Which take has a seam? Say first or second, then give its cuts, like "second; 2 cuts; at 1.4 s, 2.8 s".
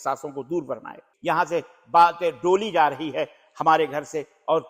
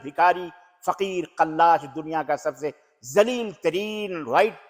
first; 1 cut; at 1.1 s